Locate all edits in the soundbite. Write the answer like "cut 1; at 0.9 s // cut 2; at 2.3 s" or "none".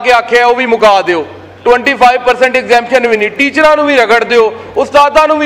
none